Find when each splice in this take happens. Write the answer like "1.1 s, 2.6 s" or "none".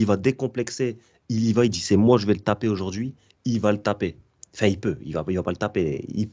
none